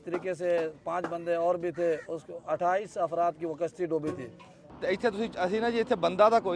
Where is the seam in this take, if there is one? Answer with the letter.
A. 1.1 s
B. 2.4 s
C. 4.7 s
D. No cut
C